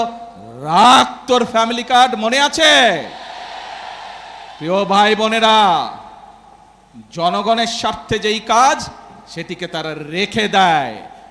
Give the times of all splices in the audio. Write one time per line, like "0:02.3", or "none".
none